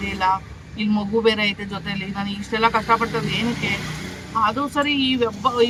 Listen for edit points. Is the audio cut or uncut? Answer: uncut